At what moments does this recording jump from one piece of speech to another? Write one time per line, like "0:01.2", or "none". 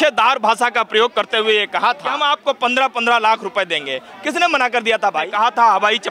0:02.1
0:05.3